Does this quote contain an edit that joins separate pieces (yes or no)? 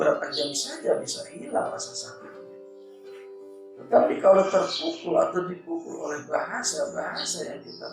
yes